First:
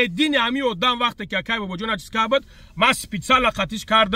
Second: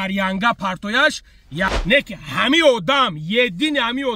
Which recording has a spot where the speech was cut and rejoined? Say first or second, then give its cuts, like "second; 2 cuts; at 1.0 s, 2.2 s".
second; 1 cut; at 1.7 s